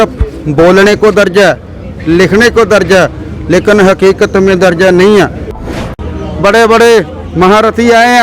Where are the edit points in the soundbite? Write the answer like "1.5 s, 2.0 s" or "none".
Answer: 5.9 s